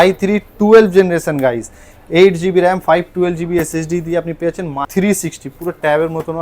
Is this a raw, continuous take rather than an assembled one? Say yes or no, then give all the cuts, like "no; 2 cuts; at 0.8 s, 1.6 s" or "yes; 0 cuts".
no; 1 cut; at 4.9 s